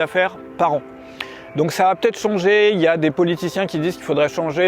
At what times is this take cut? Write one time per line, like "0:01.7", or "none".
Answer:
none